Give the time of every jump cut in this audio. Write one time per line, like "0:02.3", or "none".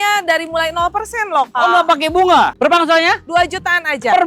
0:02.5